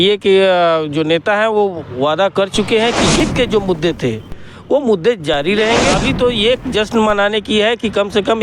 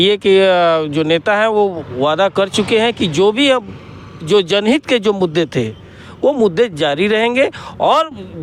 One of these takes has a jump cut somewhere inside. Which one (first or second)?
first